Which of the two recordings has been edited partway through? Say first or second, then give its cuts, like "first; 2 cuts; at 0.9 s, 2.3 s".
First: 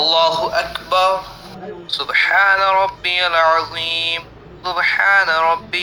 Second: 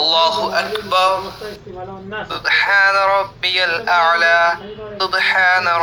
first; 1 cut; at 1.2 s